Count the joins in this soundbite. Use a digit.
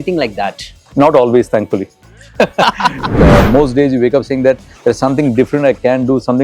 1